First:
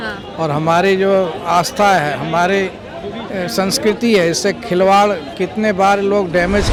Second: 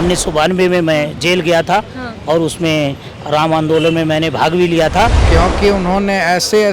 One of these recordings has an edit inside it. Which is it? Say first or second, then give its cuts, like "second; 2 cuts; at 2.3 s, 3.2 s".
second; 1 cut; at 5.2 s